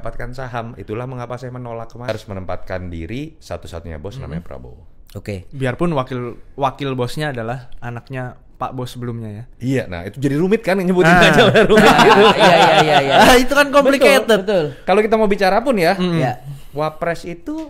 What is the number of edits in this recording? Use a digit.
1